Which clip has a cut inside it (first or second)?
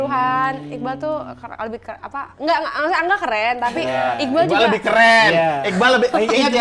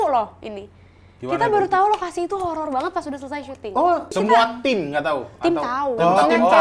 second